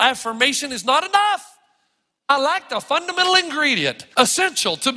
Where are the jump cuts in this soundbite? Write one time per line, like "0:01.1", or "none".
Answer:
0:02.3
0:04.0